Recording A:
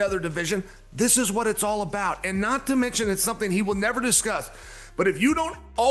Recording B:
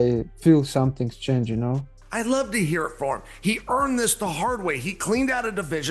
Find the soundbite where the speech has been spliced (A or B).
B